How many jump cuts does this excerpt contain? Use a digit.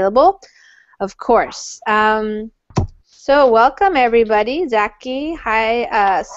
1